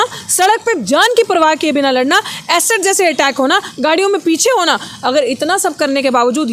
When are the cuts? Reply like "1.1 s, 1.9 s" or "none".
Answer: none